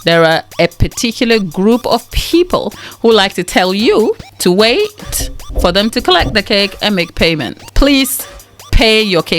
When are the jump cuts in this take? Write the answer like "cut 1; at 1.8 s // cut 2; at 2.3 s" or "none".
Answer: cut 1; at 2.8 s // cut 2; at 4.3 s // cut 3; at 7.6 s